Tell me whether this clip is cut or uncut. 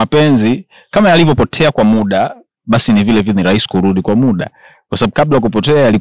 uncut